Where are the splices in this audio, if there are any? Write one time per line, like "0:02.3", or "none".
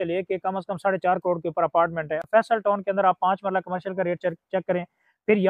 0:02.2